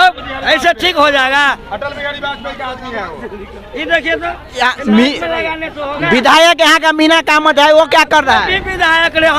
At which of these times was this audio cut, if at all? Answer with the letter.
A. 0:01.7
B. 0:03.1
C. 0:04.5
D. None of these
D